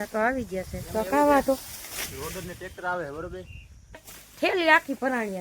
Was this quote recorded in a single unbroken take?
no; 1 cut; at 4.2 s

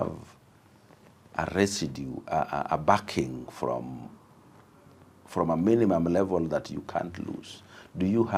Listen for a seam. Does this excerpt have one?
no; 0 cuts

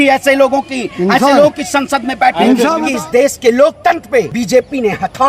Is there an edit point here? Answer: yes; 2 cuts; at 2.8 s, 4.3 s

